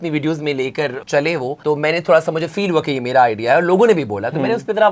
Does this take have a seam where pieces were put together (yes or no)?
yes